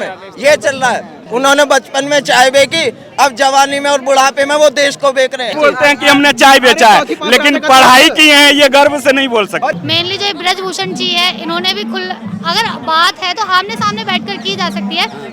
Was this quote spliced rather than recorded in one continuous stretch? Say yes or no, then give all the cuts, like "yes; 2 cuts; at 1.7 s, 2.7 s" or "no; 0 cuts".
yes; 3 cuts; at 1.1 s, 5.5 s, 9.7 s